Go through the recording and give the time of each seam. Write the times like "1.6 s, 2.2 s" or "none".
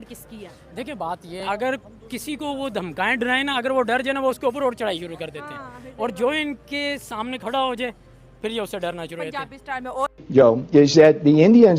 1.4 s, 10.0 s